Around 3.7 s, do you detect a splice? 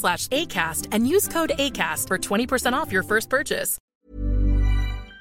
yes; 1 cut; at 3.7 s

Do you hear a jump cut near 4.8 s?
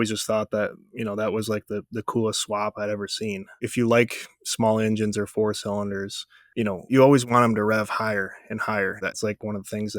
no; 3 cuts; at 3.5 s, 6.9 s, 9.2 s

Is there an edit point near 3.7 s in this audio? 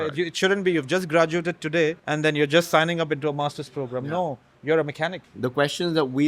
no; 2 cuts; at 2.0 s, 5.2 s

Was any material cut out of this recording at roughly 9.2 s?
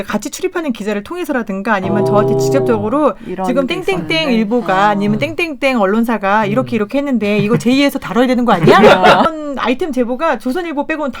yes; 1 cut; at 9.2 s

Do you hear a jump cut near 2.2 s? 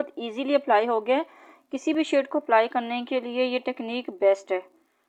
no; 0 cuts

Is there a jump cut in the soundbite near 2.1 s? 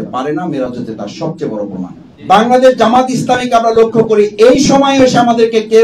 yes; 1 cut; at 2.1 s

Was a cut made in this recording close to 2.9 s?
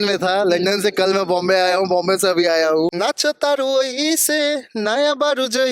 yes; 1 cut; at 2.9 s

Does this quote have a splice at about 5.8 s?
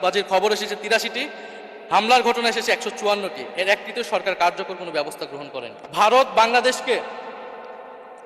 yes; 1 cut; at 5.8 s

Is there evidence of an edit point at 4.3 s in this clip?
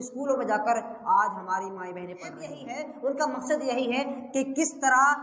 no; 1 cut; at 2.6 s

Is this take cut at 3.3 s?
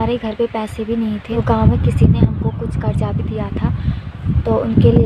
no; 1 cut; at 1.3 s

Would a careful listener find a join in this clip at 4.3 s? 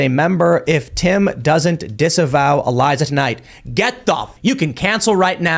yes; 1 cut; at 4.3 s

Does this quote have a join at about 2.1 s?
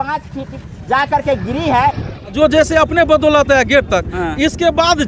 yes; 1 cut; at 2.1 s

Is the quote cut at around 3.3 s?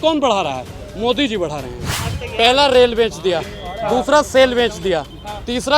no; 1 cut; at 2.0 s

